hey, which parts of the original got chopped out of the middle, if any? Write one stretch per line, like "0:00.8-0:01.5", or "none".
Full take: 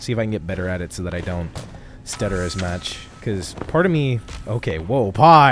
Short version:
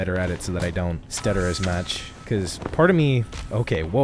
0:01.6-0:02.0